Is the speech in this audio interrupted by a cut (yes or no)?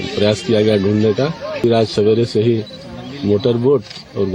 yes